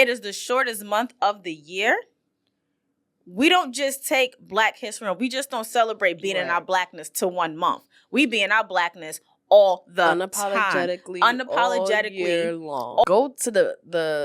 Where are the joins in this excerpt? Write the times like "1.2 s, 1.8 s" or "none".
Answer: 13.0 s